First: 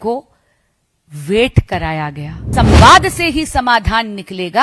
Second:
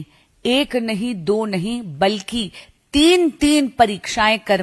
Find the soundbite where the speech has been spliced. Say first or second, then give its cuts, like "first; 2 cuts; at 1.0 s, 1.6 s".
first; 1 cut; at 2.5 s